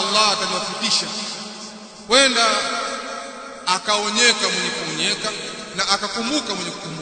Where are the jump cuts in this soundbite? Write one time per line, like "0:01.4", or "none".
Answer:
0:05.6